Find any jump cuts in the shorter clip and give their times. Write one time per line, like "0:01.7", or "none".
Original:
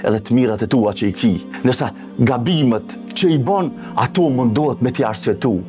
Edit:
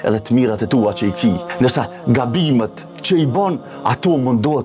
0:01.6